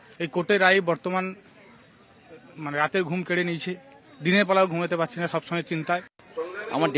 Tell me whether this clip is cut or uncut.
cut